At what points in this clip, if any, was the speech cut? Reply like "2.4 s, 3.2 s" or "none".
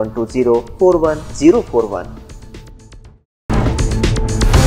3.5 s